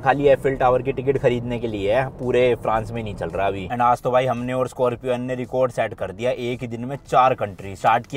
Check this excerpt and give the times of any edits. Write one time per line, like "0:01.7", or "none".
0:03.7

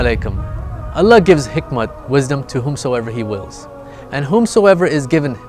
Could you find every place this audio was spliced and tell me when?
none

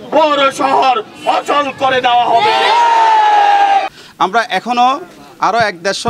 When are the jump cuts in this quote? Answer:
0:03.9

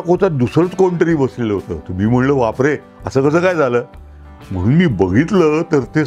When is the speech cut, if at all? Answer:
none

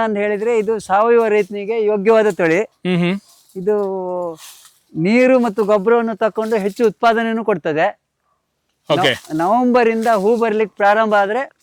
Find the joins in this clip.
none

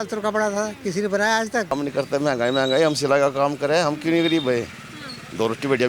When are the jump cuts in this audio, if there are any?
0:01.7

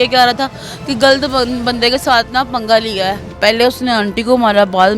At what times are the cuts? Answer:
0:03.4

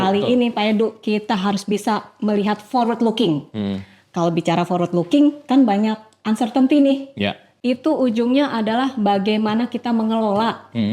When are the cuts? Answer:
0:07.4

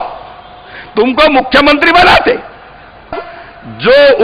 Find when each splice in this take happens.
0:03.3

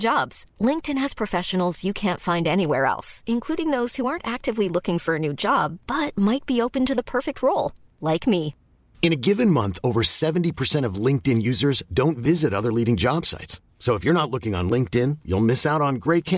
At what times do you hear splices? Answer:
none

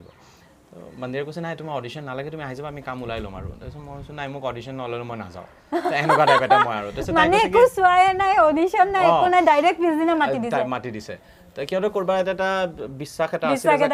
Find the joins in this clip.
none

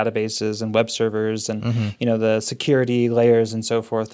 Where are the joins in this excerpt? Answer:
none

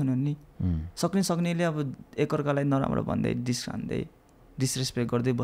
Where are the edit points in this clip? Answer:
none

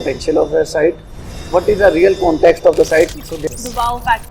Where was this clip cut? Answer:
0:03.4

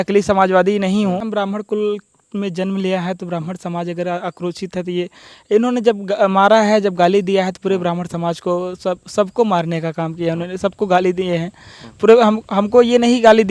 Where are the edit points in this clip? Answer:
0:01.3

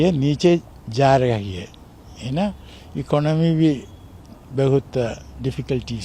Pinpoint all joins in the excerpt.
none

